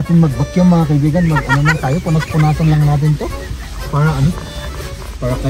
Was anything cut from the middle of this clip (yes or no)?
no